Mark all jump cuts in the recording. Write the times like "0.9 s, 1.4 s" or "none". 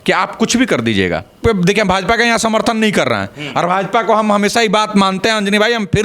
1.3 s